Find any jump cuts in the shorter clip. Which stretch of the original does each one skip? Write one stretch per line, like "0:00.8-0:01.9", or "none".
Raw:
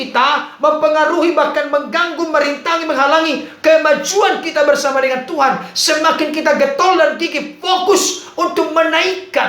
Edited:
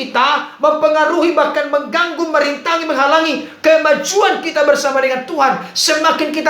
none